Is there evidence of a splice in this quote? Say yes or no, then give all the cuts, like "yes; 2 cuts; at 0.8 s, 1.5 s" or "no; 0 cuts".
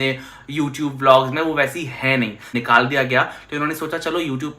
yes; 1 cut; at 2.5 s